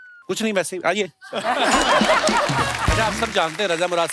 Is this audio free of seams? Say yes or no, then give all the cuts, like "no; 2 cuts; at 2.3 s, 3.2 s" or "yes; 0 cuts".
no; 1 cut; at 2.9 s